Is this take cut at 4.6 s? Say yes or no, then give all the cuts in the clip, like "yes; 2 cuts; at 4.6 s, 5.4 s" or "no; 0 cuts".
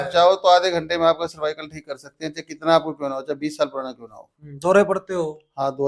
no; 0 cuts